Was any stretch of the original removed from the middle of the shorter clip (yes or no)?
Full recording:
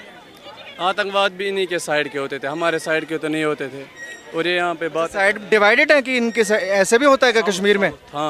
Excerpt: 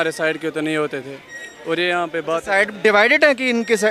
no